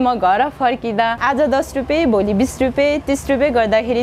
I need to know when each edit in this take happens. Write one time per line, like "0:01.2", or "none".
0:01.2